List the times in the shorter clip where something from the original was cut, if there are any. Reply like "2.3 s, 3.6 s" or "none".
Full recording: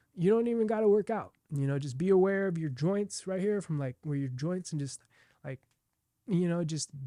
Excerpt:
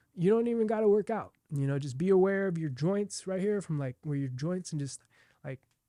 none